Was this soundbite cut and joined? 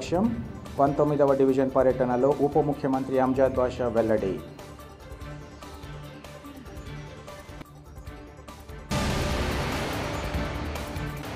no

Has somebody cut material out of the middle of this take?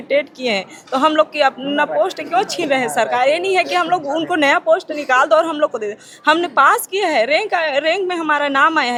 no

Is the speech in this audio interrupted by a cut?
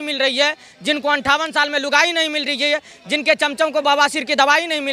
no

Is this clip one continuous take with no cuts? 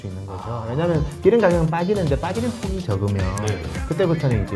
yes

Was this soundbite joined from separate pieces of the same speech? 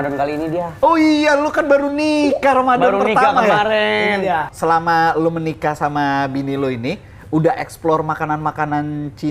yes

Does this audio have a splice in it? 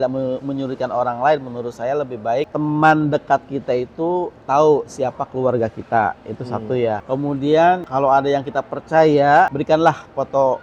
yes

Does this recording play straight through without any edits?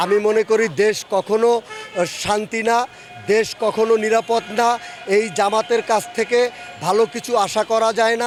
yes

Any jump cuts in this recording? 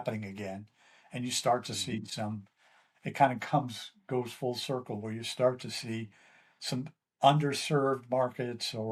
no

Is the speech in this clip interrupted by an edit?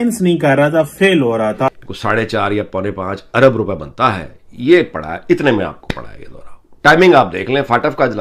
yes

